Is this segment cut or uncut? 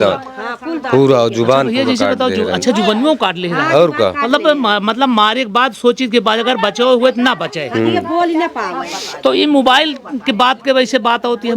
uncut